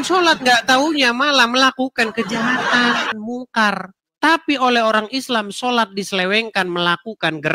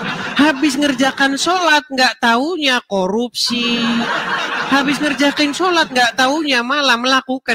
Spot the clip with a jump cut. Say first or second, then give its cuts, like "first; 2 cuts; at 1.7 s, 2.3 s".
first; 1 cut; at 3.2 s